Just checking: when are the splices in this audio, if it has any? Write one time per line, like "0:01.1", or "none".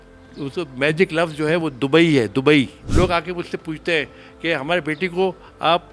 0:02.8